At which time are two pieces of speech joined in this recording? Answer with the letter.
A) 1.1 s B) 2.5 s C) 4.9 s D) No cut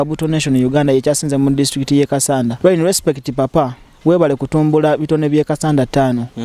B